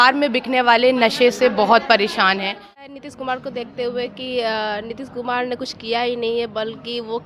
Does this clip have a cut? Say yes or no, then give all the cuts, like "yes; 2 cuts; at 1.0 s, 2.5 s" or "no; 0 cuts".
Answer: yes; 1 cut; at 2.8 s